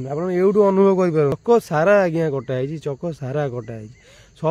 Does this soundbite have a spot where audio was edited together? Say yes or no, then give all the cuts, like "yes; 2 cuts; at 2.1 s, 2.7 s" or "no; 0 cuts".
yes; 1 cut; at 1.4 s